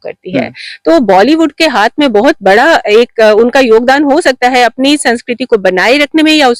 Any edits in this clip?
no; 0 cuts

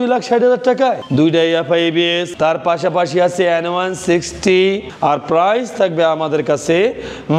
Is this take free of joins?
no; 2 cuts; at 2.3 s, 4.9 s

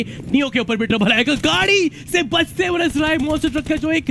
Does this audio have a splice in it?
no; 0 cuts

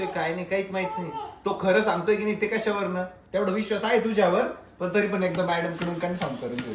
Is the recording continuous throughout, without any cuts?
yes; 0 cuts

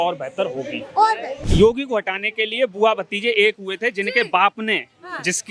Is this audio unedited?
no; 1 cut; at 1.4 s

